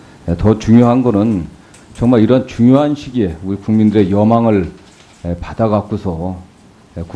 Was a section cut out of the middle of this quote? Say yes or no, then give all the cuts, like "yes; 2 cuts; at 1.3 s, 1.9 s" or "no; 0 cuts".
no; 0 cuts